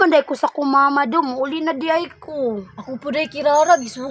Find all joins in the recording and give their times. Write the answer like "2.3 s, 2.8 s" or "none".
none

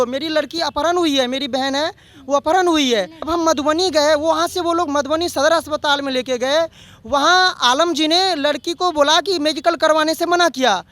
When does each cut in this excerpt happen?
3.3 s

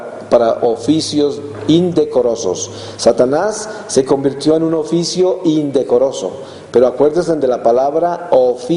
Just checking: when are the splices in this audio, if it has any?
1.8 s

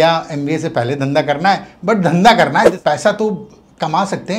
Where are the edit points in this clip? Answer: 2.7 s

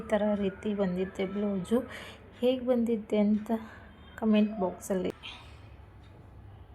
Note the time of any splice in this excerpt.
5.2 s

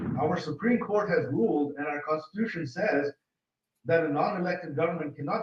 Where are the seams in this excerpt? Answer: none

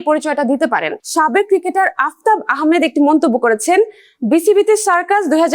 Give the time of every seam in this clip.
1.0 s

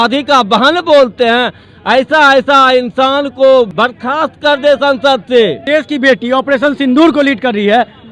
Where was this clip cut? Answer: 3.7 s, 5.6 s

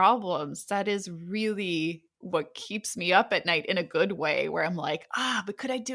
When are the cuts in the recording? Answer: none

